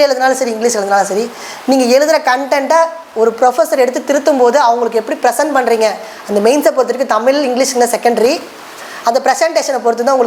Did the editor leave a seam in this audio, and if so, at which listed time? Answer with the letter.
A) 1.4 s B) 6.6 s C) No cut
C